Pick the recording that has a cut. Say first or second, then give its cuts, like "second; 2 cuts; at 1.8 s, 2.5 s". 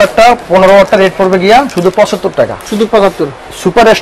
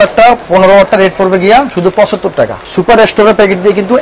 second; 1 cut; at 2.6 s